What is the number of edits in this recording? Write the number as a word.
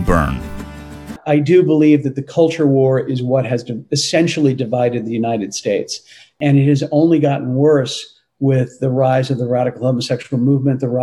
two